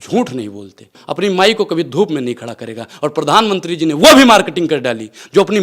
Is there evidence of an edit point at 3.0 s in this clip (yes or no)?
no